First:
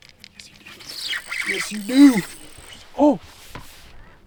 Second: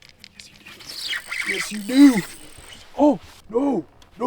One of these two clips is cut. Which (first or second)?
second